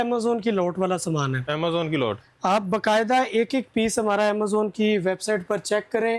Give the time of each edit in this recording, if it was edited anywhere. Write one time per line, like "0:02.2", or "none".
none

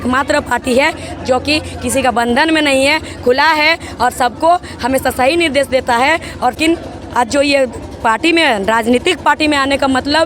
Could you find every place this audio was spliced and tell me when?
0:06.6

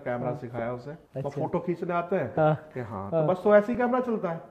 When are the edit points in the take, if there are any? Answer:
0:01.0

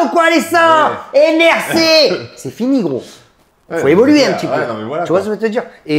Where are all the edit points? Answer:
none

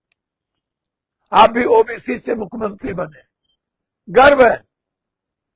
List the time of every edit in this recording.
none

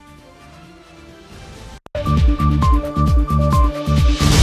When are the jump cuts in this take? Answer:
0:01.8

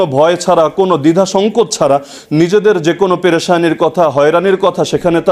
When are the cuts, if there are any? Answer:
none

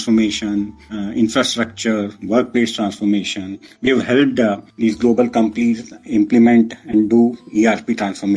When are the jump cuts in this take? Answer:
none

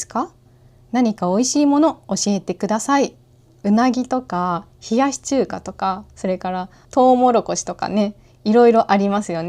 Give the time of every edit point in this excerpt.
0:03.6
0:06.8

